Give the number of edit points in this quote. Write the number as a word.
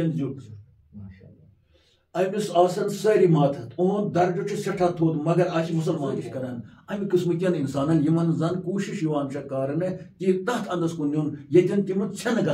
one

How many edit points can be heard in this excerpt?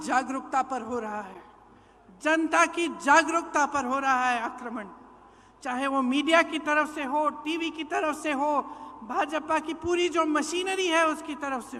zero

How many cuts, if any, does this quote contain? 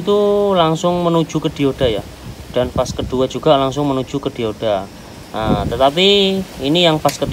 zero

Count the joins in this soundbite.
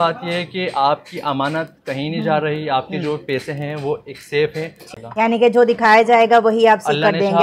one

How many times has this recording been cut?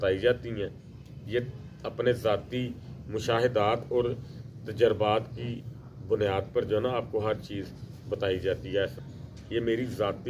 one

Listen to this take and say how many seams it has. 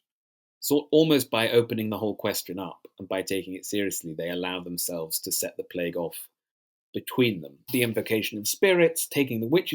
one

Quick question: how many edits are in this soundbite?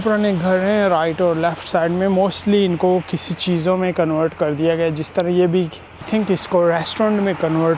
one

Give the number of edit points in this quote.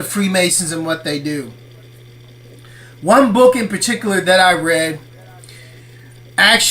one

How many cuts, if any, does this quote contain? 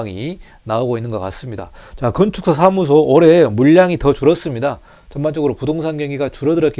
zero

